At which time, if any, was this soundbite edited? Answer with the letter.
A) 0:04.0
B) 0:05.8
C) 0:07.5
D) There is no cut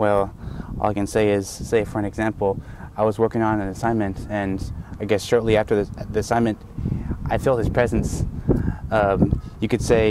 D